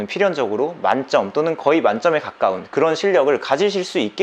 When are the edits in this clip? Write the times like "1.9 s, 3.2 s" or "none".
none